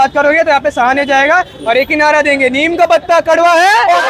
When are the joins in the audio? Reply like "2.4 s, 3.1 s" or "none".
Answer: none